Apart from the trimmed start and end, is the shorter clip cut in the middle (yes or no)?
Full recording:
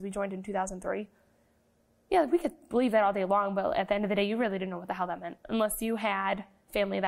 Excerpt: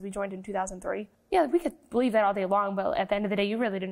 yes